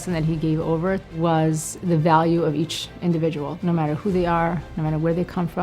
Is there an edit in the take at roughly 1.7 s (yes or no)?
yes